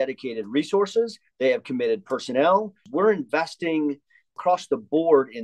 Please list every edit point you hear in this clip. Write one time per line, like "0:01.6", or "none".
0:02.8
0:04.4